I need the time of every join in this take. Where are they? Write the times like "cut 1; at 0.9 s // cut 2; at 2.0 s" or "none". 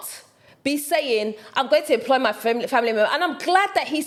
none

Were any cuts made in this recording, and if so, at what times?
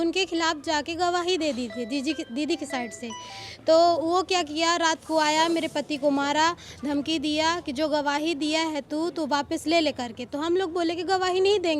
none

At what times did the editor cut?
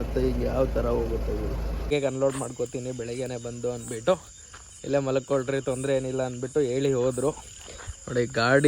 cut 1; at 1.9 s

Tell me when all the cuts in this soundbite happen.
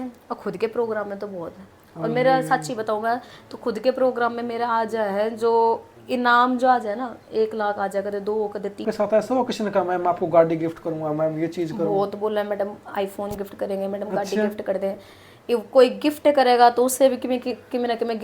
cut 1; at 8.8 s

